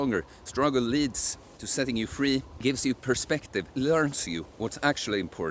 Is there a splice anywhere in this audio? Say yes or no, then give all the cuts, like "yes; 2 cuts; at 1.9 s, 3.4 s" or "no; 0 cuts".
yes; 2 cuts; at 2.6 s, 3.7 s